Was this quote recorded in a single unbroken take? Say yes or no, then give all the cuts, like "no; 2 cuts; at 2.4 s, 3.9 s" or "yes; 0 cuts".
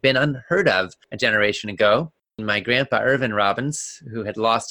no; 2 cuts; at 1.0 s, 2.4 s